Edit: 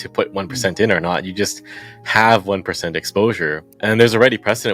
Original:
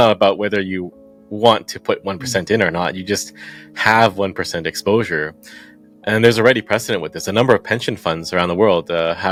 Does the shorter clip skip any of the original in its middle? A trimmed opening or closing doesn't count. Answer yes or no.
yes